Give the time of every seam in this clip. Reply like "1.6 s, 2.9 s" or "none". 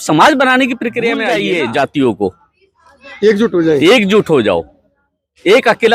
1.3 s